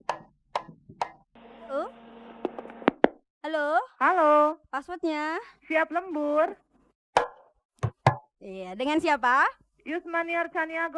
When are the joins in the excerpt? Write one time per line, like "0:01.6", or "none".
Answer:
0:01.2